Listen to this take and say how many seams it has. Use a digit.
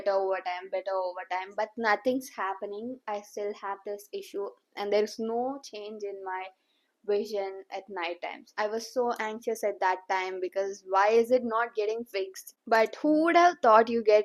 2